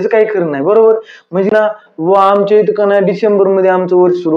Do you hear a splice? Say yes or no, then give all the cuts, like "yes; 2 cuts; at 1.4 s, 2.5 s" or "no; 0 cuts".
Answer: yes; 1 cut; at 1.5 s